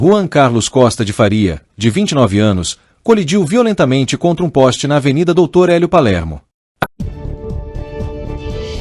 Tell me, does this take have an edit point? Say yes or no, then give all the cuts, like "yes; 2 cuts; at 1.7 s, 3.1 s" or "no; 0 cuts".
yes; 1 cut; at 6.8 s